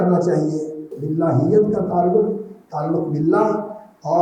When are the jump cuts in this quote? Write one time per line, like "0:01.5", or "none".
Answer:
0:00.9